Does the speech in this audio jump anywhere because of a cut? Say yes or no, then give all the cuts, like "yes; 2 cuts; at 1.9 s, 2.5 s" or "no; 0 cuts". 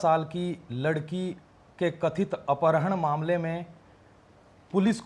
no; 0 cuts